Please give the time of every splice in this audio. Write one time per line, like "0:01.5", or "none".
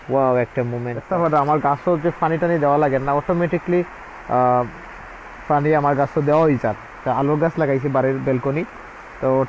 0:00.9